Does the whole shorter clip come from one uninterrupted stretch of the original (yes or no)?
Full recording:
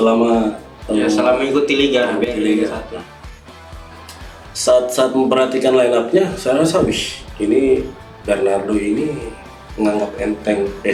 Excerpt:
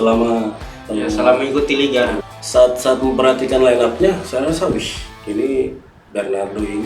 no